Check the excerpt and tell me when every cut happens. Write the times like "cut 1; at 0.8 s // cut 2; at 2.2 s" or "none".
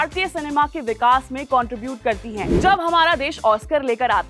cut 1; at 2.4 s

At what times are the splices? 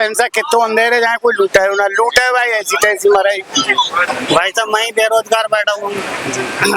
cut 1; at 4.0 s

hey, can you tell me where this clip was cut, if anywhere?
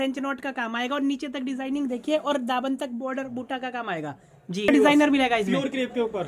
cut 1; at 4.7 s

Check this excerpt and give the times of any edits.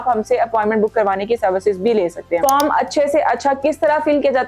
cut 1; at 2.4 s

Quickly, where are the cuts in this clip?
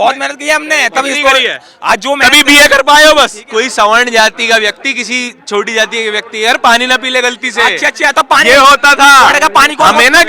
cut 1; at 3.4 s

